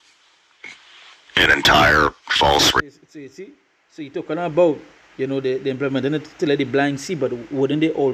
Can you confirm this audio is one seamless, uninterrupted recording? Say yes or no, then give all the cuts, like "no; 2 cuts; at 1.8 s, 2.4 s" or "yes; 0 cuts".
yes; 0 cuts